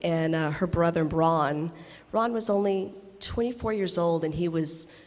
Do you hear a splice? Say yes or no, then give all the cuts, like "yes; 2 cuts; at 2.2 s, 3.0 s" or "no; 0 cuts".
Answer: yes; 1 cut; at 2.0 s